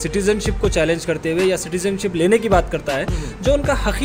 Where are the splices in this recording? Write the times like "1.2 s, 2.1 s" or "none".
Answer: none

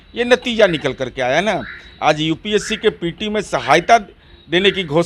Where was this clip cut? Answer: none

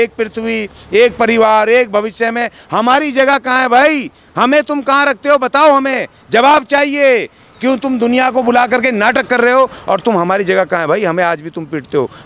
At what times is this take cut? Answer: none

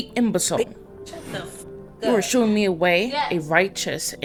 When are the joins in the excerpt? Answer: none

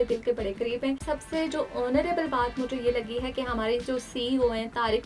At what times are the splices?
1.0 s

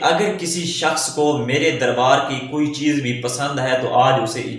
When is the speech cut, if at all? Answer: none

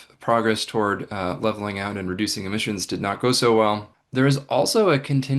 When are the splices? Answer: 3.9 s

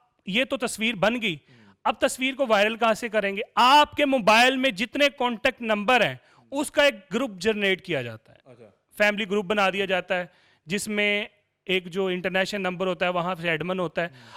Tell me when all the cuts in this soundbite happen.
none

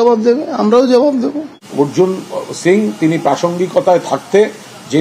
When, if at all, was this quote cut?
1.7 s

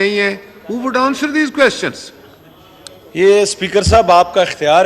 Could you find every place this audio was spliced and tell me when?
none

